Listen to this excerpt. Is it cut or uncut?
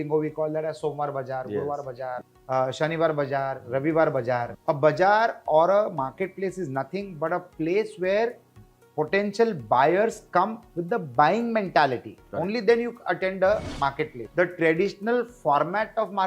cut